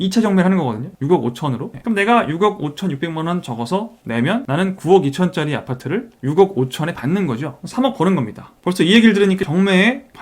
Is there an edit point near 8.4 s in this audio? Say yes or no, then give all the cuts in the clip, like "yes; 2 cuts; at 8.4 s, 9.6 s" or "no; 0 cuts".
yes; 2 cuts; at 1.7 s, 8.4 s